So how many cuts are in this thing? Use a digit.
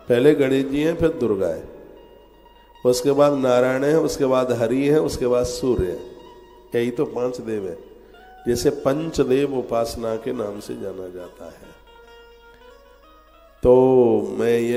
0